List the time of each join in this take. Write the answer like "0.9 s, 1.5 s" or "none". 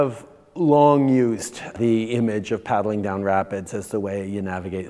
1.7 s